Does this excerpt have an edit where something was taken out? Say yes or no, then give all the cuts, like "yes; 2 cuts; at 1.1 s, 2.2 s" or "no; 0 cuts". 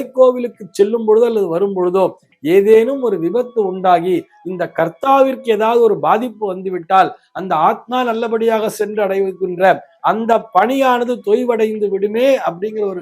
no; 0 cuts